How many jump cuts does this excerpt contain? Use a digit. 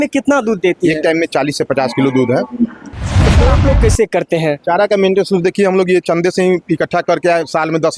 1